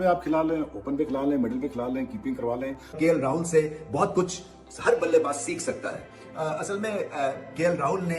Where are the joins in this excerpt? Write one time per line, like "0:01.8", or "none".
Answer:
0:02.9